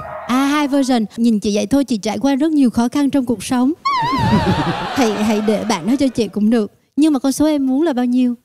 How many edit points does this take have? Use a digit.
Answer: 1